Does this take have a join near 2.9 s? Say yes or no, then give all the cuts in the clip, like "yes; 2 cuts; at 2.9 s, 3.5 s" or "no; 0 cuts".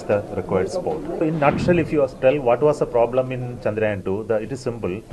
no; 1 cut; at 1.2 s